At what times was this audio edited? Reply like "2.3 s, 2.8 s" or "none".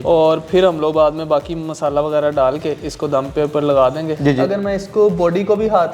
4.1 s